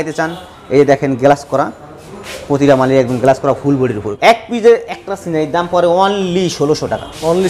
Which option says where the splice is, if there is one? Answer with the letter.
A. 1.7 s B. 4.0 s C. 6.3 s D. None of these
B